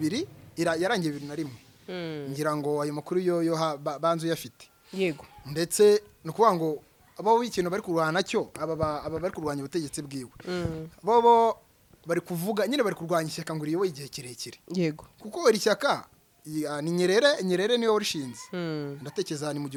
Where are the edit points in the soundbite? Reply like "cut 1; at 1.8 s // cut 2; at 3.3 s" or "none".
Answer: none